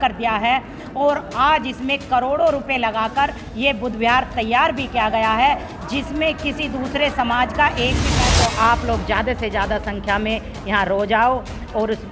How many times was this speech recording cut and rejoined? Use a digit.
1